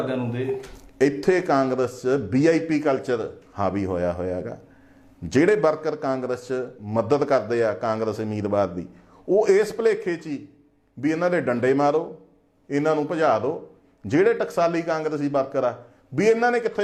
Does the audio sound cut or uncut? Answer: uncut